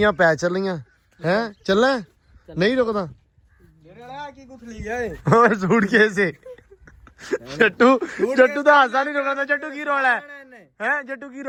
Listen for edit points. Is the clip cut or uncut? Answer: uncut